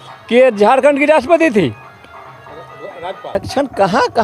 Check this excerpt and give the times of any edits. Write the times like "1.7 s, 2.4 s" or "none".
3.4 s